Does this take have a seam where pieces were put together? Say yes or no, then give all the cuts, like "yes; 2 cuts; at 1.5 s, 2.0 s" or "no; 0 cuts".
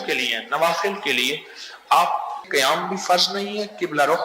yes; 1 cut; at 2.4 s